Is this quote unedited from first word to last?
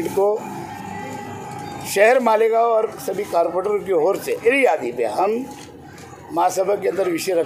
no; 1 cut; at 4.4 s

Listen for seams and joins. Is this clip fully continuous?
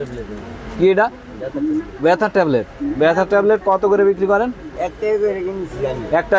yes; 0 cuts

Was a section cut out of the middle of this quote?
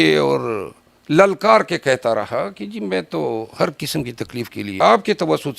yes; 1 cut; at 4.6 s

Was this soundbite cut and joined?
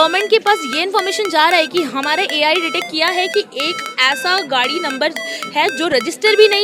no; 0 cuts

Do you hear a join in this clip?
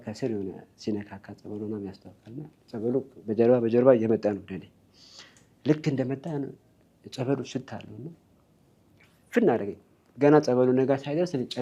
no; 0 cuts

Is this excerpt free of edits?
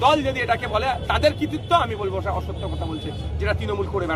yes; 0 cuts

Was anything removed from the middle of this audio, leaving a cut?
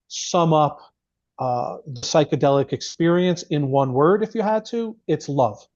no; 0 cuts

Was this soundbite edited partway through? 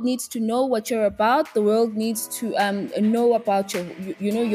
no; 0 cuts

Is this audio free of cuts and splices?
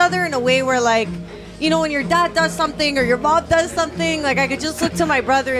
yes; 0 cuts

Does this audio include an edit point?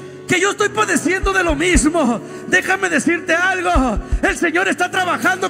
no; 0 cuts

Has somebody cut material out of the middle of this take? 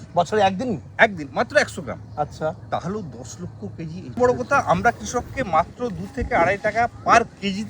yes; 1 cut; at 4.2 s

